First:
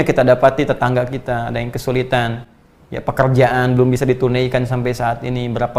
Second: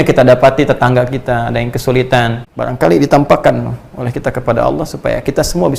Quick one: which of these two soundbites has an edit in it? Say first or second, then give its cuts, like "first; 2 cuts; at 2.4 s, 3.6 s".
second; 1 cut; at 2.4 s